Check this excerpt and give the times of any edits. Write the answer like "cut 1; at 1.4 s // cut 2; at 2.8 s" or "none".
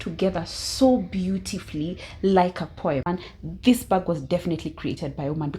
cut 1; at 3.1 s